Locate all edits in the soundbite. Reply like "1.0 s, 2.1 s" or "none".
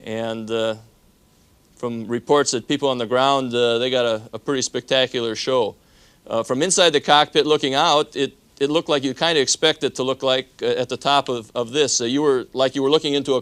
none